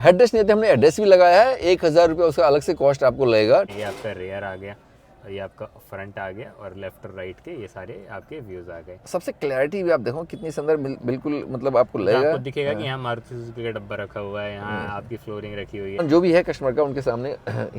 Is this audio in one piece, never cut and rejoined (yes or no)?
no